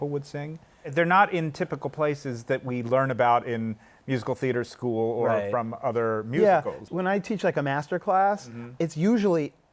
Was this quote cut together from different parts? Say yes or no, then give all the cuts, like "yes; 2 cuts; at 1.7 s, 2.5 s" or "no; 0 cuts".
yes; 2 cuts; at 6.8 s, 8.6 s